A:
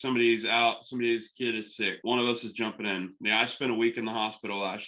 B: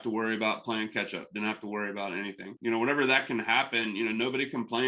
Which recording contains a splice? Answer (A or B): A